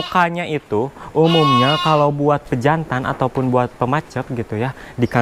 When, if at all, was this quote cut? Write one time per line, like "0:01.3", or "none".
none